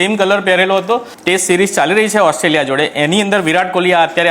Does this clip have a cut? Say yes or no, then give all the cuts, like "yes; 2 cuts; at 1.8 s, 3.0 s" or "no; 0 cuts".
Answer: yes; 1 cut; at 1.1 s